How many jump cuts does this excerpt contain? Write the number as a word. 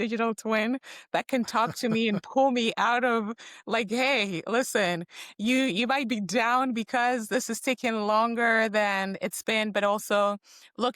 zero